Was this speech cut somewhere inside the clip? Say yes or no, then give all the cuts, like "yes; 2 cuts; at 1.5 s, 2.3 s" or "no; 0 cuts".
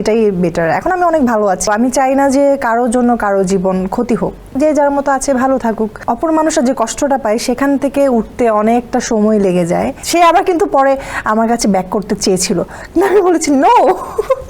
yes; 4 cuts; at 1.7 s, 4.4 s, 6.0 s, 10.0 s